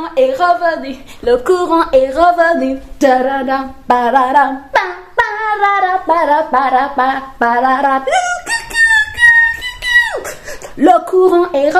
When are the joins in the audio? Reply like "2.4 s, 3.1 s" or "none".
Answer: none